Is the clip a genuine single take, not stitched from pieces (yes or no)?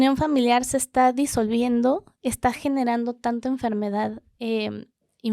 yes